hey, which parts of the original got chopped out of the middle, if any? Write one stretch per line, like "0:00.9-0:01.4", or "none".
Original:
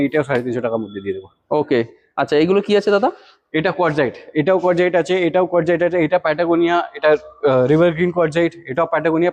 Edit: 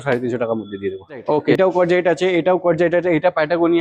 0:01.8-0:04.4